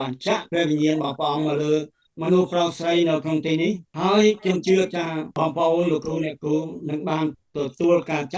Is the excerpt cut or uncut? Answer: cut